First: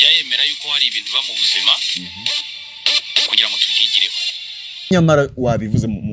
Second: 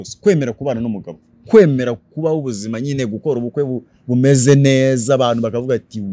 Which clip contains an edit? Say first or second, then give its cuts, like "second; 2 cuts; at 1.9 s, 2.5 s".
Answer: first; 1 cut; at 4.9 s